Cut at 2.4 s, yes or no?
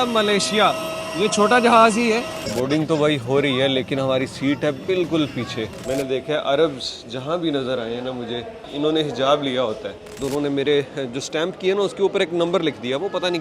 yes